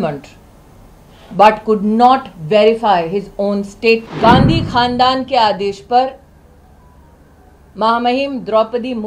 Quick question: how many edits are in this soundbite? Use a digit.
1